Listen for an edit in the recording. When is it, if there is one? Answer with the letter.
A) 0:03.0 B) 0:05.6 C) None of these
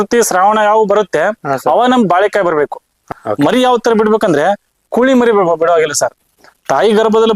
A